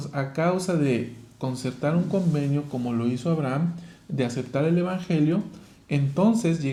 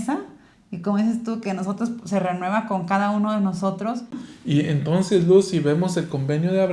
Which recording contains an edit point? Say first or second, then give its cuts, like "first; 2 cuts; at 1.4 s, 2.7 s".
second; 1 cut; at 4.3 s